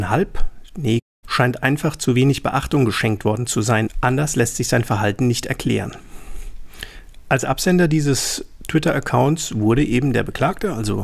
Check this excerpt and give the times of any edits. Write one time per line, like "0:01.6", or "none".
none